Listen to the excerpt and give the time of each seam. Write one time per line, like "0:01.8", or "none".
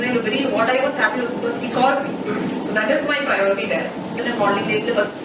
0:04.2